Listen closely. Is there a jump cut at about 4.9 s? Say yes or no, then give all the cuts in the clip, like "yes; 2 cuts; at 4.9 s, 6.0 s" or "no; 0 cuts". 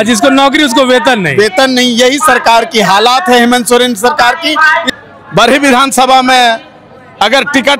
yes; 1 cut; at 4.9 s